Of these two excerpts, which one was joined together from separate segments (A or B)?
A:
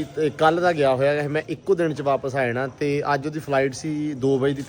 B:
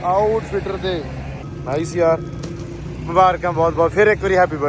B